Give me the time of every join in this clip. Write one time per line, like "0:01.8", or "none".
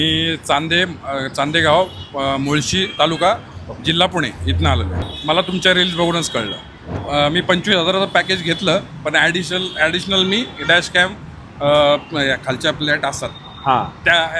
0:04.9
0:06.8

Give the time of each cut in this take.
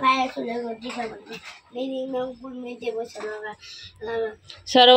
none

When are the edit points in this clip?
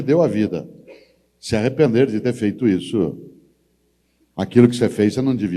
none

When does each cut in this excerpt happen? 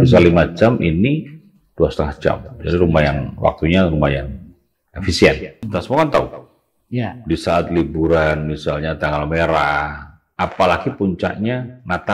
0:05.6

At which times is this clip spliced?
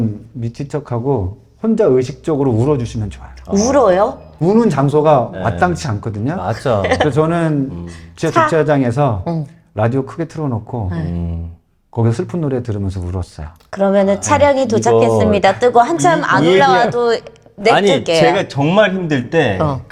none

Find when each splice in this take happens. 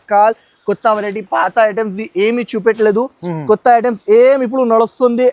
none

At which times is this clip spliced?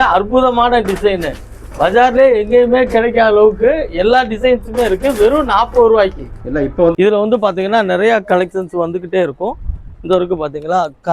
0:06.9

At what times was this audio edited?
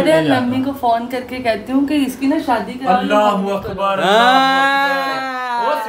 none

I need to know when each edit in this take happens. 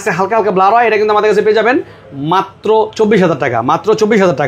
none

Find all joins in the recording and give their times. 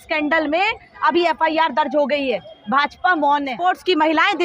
0:03.6

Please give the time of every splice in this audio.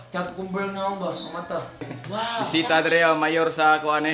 0:01.8

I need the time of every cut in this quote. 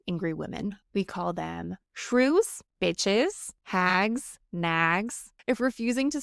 0:00.8
0:02.6
0:03.5
0:04.4
0:05.3

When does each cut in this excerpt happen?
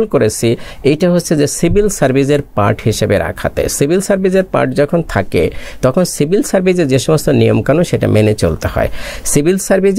none

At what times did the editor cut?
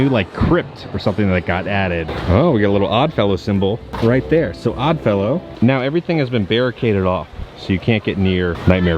0:02.0
0:05.5

